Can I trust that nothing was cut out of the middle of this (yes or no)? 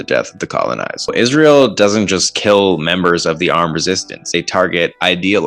no